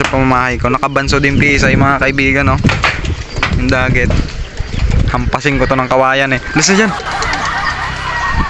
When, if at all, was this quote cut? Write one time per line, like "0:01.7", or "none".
none